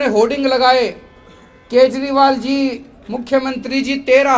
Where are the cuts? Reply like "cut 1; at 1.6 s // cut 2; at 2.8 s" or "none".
none